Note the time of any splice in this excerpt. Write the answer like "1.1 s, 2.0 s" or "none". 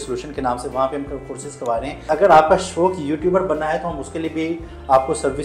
2.1 s

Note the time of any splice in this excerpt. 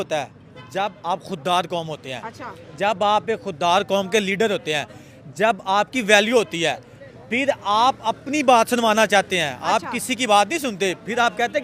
none

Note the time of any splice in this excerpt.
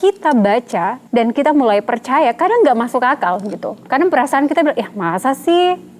1.0 s

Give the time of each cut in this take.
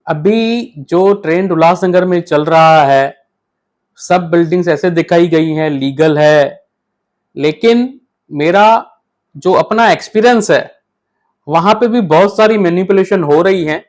none

